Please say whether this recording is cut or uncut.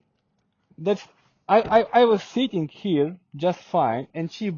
uncut